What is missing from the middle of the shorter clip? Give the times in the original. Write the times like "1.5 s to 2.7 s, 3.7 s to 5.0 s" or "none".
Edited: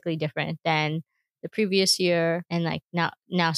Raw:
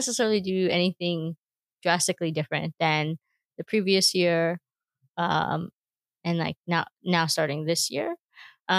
4.6 s to 6.2 s